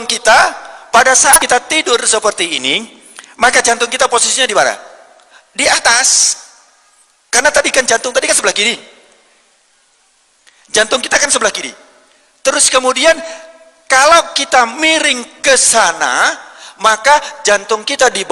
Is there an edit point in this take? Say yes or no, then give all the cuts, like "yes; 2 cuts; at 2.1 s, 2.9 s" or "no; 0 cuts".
yes; 1 cut; at 1.4 s